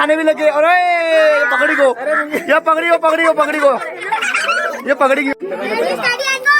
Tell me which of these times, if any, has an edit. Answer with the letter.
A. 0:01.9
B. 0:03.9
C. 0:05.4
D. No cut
C